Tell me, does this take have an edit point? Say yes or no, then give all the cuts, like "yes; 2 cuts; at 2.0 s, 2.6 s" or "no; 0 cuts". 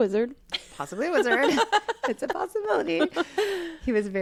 no; 0 cuts